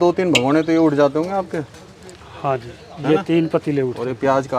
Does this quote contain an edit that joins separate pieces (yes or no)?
no